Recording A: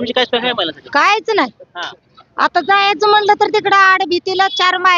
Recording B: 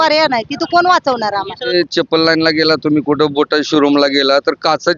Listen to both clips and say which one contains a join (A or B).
B